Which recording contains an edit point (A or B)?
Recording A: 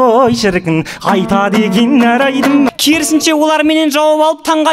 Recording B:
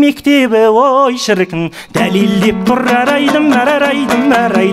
A